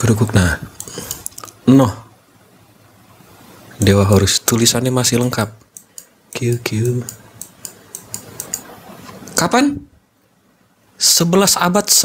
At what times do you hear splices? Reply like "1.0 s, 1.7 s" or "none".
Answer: none